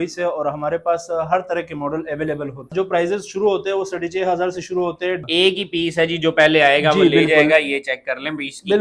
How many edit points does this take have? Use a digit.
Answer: 2